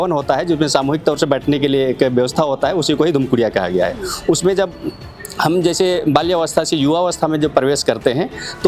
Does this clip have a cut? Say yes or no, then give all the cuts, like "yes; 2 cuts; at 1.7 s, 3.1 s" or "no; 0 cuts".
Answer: no; 0 cuts